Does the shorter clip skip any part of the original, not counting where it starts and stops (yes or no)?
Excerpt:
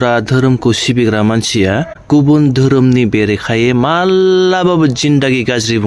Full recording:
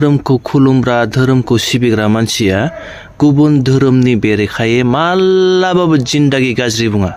yes